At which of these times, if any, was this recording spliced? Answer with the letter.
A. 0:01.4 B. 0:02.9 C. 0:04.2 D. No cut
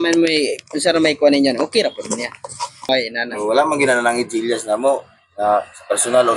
B